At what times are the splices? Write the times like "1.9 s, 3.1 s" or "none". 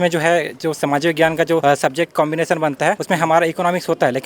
1.6 s, 3.0 s